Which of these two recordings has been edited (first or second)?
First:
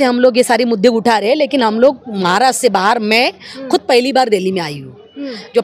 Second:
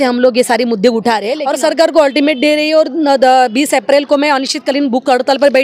second